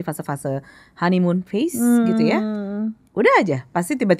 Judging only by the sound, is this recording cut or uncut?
uncut